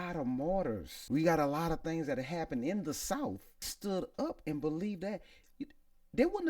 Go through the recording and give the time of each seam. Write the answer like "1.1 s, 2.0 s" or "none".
0.9 s, 3.7 s